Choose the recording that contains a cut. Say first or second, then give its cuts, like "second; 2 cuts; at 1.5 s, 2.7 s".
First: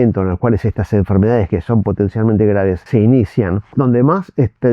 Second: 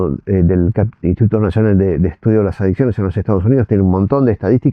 first; 2 cuts; at 2.8 s, 3.7 s